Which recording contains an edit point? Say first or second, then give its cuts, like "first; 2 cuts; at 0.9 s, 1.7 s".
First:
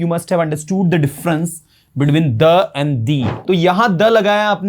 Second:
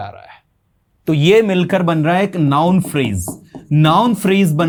first; 1 cut; at 3.3 s